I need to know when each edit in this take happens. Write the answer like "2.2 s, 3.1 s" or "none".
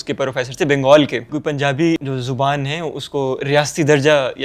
1.3 s, 2.0 s